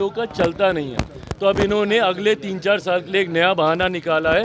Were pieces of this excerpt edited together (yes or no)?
no